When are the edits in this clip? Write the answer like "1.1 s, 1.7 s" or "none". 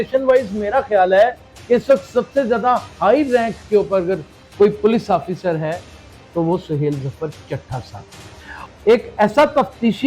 8.5 s